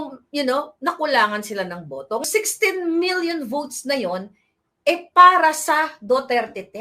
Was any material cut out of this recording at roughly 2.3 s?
yes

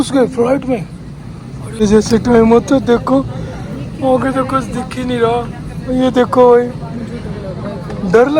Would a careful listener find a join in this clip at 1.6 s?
yes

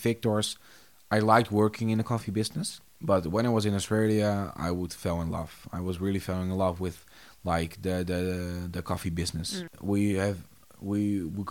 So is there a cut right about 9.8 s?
yes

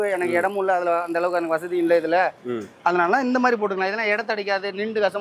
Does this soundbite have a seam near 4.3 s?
no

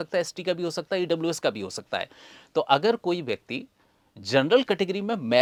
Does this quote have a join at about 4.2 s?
no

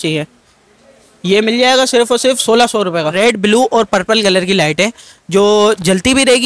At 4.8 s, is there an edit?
no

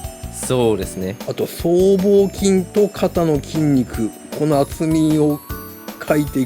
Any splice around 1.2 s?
yes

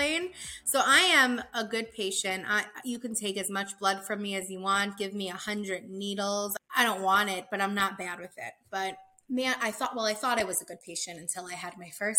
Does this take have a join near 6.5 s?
yes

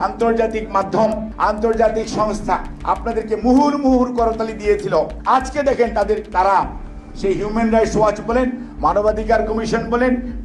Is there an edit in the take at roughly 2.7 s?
yes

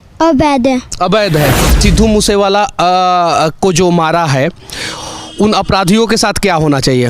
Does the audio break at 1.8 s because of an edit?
yes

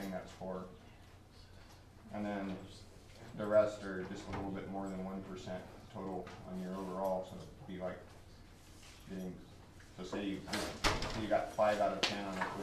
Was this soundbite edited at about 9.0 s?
no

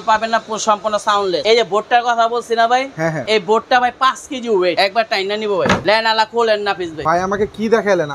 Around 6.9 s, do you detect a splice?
yes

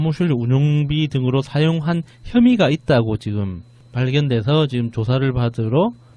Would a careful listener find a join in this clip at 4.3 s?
no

